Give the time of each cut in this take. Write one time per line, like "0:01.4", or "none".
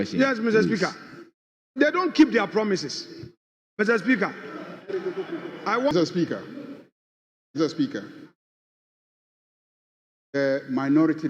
0:05.9